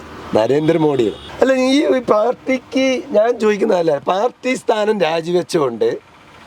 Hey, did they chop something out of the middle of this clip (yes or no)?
yes